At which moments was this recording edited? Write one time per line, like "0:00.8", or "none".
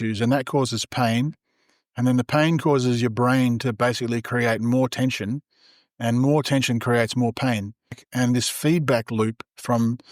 0:08.0